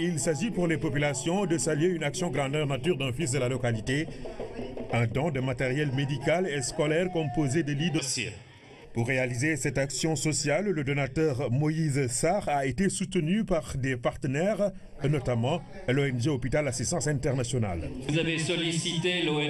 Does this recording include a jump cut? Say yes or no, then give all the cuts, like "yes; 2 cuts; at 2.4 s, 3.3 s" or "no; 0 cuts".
no; 0 cuts